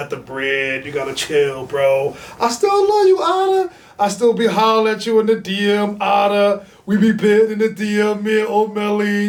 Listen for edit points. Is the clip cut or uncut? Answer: uncut